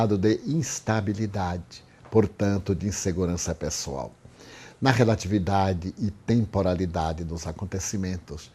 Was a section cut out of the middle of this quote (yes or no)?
yes